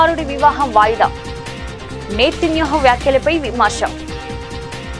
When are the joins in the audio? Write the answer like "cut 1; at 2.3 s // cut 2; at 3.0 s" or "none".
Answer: cut 1; at 4.0 s

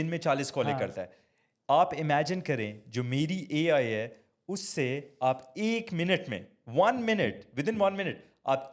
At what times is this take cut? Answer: none

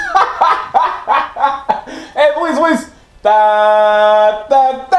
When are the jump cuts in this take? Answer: cut 1; at 3.3 s

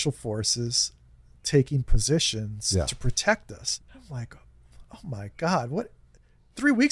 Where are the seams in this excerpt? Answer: cut 1; at 3.7 s

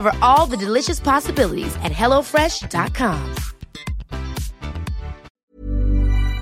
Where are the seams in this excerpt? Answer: cut 1; at 5.3 s

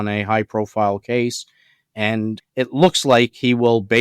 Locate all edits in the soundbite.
cut 1; at 2.4 s

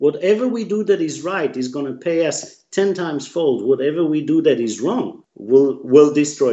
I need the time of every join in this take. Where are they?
cut 1; at 5.3 s

